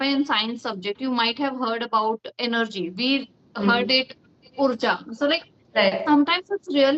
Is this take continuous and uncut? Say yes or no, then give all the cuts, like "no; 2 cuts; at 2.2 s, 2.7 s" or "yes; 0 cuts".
yes; 0 cuts